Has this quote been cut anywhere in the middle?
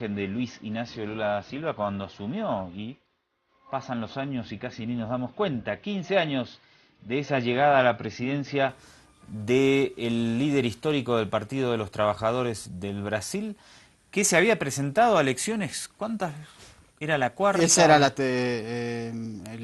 yes; 1 cut; at 8.7 s

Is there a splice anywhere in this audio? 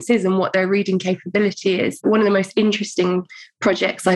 yes; 1 cut; at 2.0 s

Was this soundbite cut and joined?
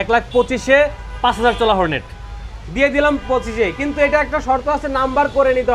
no; 0 cuts

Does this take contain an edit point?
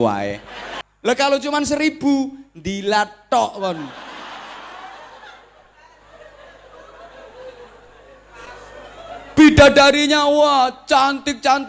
yes; 1 cut; at 0.9 s

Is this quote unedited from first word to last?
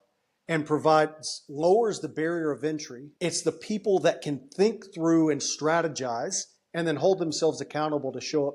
no; 1 cut; at 3.0 s

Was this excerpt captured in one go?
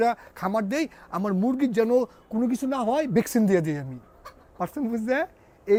yes; 0 cuts

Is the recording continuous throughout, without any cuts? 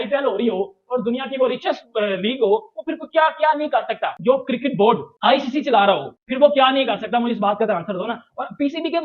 no; 1 cut; at 4.1 s

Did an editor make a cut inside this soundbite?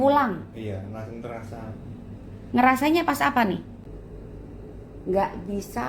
yes; 1 cut; at 3.7 s

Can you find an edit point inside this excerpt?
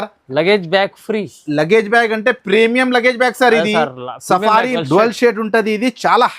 yes; 1 cut; at 4.8 s

